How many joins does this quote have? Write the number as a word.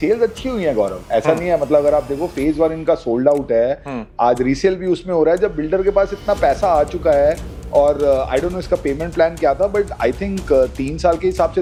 zero